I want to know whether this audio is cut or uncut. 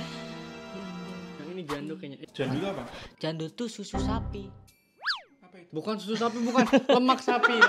uncut